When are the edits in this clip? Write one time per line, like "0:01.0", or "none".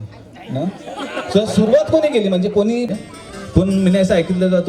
0:02.9